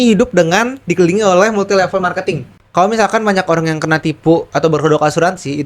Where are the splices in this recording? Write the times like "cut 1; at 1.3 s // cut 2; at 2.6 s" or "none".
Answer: cut 1; at 2.5 s